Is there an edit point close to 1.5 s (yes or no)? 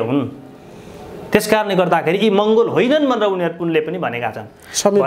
no